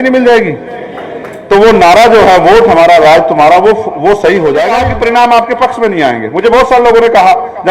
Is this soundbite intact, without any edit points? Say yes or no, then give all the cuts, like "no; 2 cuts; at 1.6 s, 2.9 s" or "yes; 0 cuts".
no; 1 cut; at 4.8 s